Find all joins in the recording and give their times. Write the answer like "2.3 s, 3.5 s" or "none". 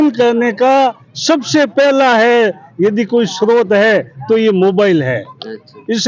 none